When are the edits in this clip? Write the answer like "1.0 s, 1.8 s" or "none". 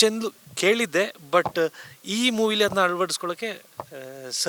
none